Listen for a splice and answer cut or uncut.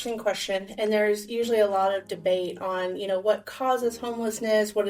uncut